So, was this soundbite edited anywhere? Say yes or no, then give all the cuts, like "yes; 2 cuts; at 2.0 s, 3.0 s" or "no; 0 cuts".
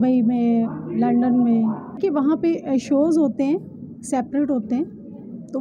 yes; 1 cut; at 2.0 s